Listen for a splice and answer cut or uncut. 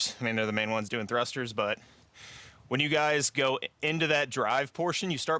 uncut